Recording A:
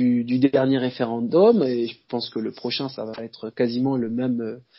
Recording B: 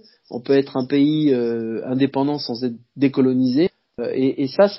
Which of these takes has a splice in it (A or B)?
B